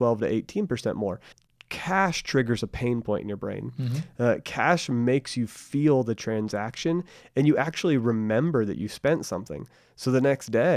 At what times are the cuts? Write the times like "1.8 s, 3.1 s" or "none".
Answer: 1.3 s